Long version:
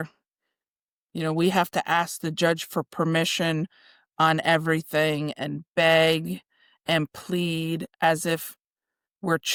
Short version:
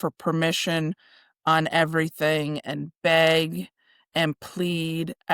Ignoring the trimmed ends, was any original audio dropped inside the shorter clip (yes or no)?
no